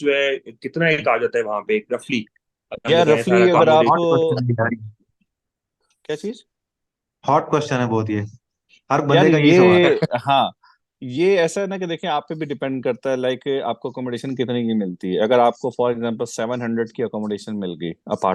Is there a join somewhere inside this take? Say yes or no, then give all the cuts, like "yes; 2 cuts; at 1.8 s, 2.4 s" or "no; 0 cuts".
no; 0 cuts